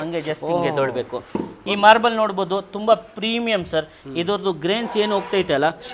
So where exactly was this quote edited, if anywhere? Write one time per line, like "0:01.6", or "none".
none